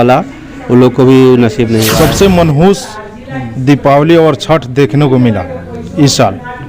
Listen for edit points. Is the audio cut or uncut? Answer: cut